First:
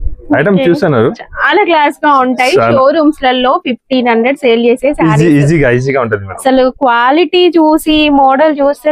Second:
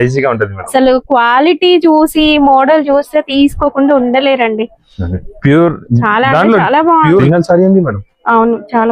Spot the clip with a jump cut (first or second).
second